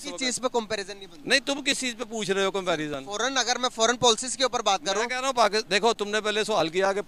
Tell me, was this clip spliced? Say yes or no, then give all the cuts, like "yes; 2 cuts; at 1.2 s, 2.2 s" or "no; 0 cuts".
no; 0 cuts